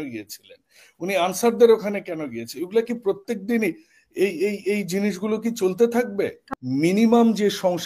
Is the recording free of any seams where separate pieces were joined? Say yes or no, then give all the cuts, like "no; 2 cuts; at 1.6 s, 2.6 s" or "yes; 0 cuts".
no; 1 cut; at 6.4 s